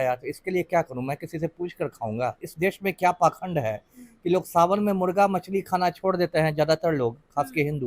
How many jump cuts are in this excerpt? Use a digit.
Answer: 1